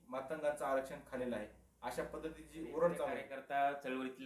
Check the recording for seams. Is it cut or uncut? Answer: cut